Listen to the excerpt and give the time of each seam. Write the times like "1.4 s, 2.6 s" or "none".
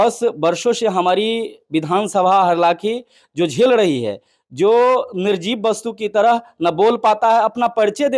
none

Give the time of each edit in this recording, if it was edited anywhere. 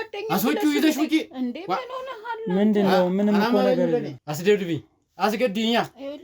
4.2 s

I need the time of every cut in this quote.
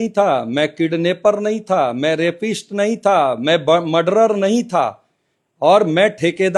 none

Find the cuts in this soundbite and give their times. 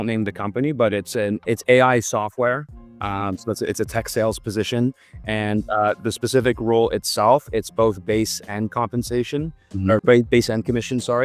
none

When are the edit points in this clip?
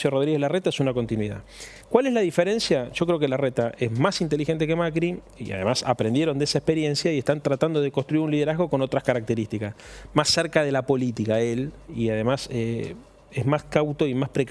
none

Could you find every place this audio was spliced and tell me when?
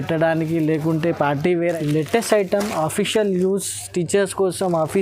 1.8 s

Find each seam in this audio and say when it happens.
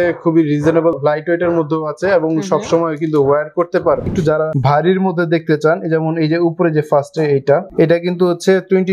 1.0 s, 4.1 s

